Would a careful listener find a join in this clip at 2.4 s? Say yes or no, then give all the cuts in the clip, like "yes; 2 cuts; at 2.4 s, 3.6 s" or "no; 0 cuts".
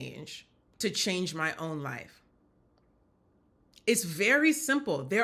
no; 0 cuts